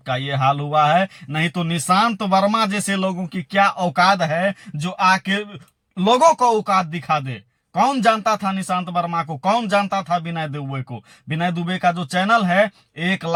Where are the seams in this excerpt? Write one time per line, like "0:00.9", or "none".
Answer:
none